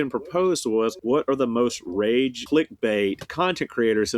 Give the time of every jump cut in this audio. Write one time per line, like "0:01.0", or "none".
0:01.0
0:02.4
0:03.3